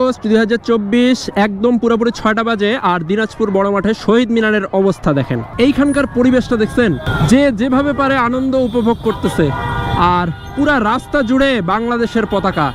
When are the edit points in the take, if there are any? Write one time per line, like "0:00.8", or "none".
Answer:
0:05.5
0:07.1